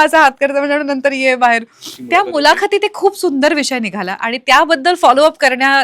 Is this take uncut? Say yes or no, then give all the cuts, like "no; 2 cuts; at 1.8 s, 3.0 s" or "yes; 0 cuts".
no; 1 cut; at 2.0 s